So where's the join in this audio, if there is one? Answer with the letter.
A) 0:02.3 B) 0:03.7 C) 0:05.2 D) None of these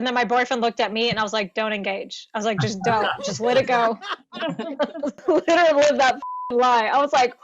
C